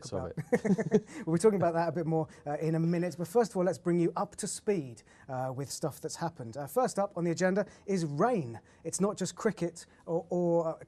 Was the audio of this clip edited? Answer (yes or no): yes